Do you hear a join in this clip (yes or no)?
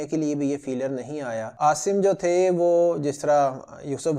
yes